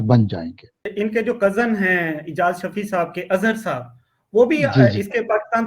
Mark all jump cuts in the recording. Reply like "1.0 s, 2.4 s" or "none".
0.9 s